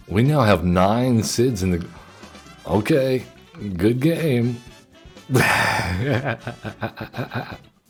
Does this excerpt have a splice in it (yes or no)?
no